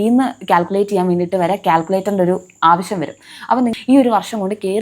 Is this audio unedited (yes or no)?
no